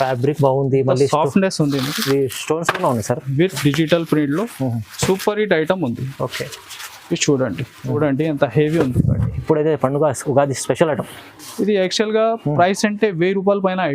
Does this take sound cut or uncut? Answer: cut